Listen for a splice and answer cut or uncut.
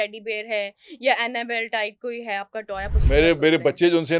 uncut